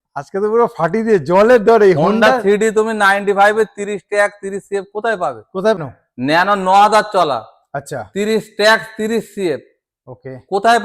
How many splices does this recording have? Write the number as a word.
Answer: one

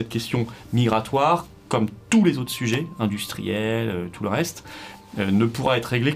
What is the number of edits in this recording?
zero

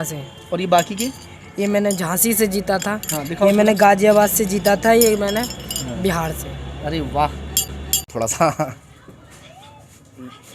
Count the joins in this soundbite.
one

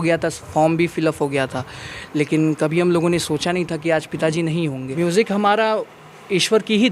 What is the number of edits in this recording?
one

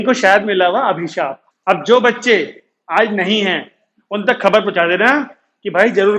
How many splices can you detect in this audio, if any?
one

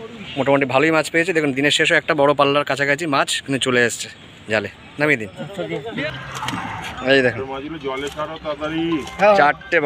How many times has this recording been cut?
one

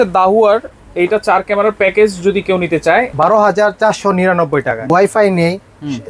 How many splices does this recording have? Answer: two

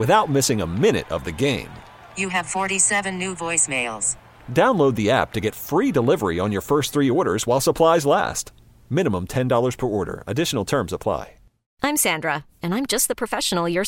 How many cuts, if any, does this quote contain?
one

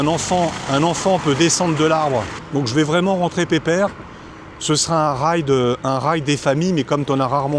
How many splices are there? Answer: one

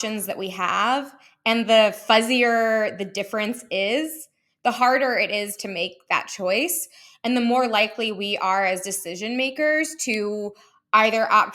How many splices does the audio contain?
zero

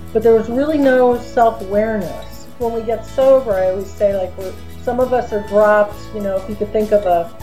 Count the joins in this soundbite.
one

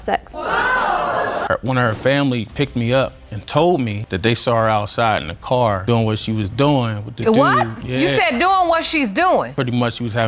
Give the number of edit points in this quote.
one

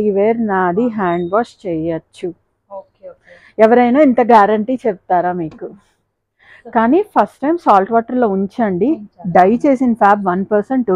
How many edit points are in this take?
zero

